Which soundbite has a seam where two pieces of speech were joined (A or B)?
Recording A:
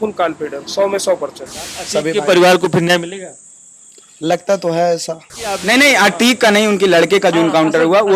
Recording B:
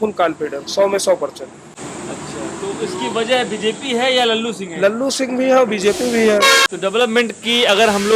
A